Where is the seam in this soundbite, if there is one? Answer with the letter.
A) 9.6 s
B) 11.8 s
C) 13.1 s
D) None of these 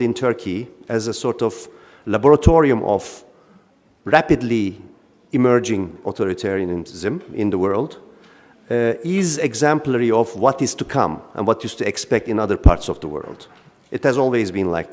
B